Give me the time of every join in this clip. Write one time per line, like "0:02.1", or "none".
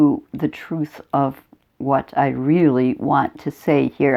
none

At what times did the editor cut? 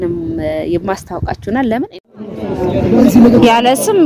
0:02.3

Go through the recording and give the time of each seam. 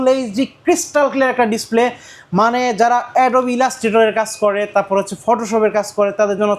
none

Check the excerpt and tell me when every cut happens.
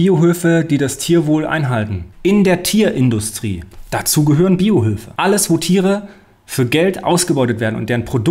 0:02.0

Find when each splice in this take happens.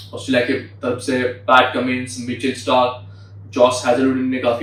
none

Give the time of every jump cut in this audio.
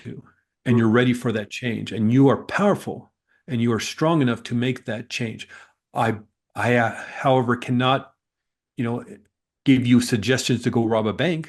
none

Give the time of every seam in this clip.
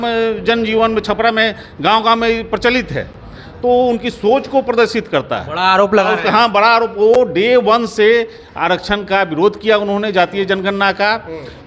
none

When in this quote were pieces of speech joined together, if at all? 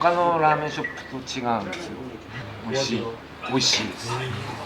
0:02.4

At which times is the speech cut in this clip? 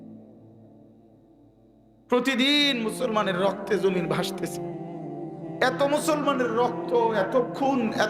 0:01.6

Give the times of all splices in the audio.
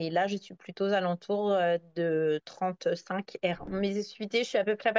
0:03.7

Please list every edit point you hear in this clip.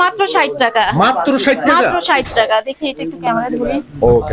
none

